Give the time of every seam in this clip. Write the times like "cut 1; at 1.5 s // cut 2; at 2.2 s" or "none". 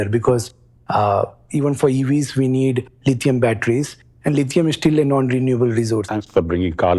cut 1; at 6.1 s

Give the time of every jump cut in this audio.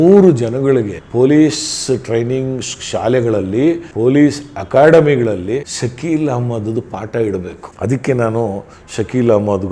cut 1; at 1.0 s // cut 2; at 3.9 s // cut 3; at 5.7 s

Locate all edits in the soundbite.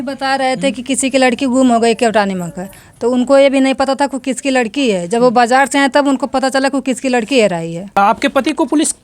cut 1; at 8.0 s

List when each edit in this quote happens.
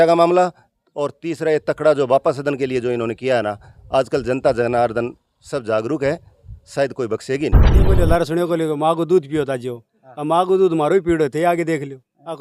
cut 1; at 7.8 s

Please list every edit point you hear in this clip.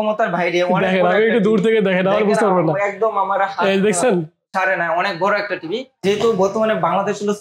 cut 1; at 6.0 s

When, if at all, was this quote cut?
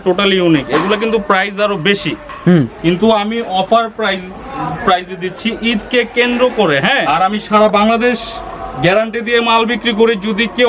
cut 1; at 7.1 s

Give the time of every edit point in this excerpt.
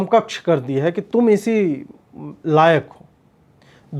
none

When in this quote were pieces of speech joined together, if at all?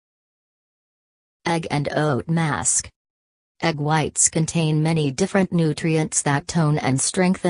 none

